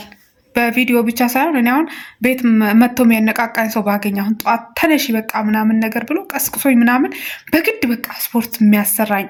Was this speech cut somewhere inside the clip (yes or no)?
no